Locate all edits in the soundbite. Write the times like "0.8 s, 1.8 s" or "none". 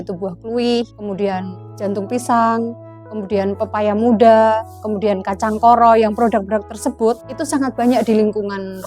1.0 s, 7.3 s

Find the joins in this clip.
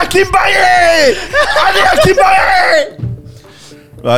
none

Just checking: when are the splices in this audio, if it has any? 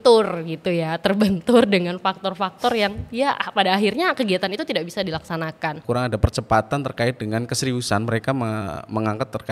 5.8 s

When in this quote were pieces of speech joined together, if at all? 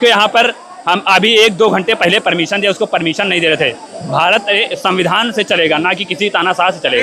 none

